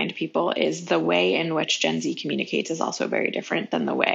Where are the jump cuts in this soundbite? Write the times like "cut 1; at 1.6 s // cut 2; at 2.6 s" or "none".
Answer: none